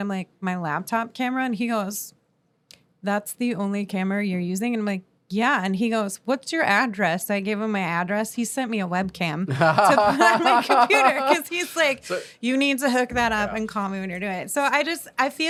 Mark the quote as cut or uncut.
uncut